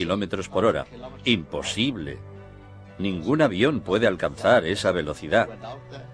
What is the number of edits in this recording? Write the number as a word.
one